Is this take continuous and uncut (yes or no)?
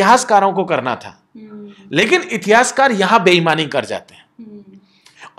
yes